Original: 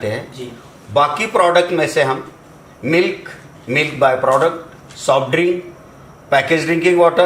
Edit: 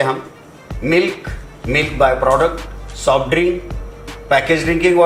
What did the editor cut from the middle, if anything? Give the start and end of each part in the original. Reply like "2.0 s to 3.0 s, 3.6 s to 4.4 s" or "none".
none